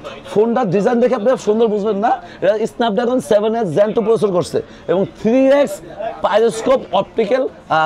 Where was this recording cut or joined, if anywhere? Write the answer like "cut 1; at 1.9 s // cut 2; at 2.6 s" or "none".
none